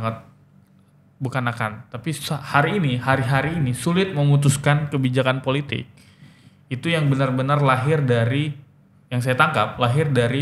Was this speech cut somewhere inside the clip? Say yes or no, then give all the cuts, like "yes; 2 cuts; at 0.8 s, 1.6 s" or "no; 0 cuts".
no; 0 cuts